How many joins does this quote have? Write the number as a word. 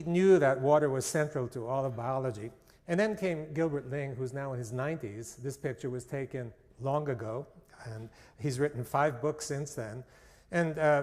one